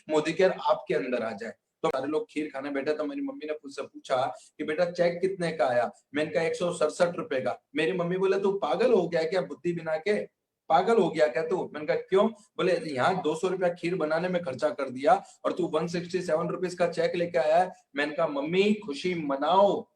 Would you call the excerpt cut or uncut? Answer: cut